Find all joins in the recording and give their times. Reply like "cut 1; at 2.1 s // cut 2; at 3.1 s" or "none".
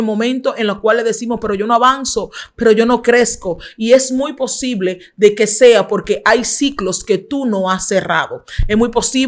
none